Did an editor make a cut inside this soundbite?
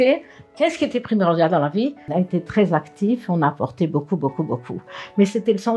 yes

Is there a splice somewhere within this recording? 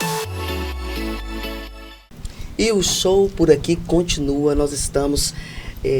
no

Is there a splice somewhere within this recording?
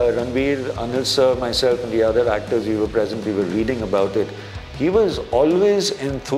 no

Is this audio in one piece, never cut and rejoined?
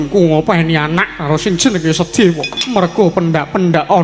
no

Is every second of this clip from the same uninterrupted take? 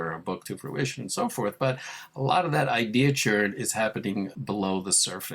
no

